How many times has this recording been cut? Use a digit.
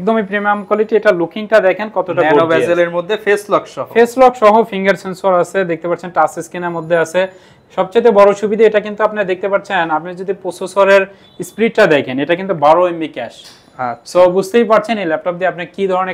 0